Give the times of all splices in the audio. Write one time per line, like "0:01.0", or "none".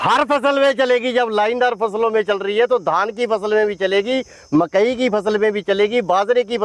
none